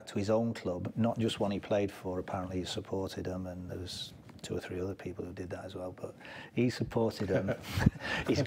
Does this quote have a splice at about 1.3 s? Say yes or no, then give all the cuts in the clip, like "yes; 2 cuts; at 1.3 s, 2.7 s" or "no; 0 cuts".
no; 1 cut; at 3.4 s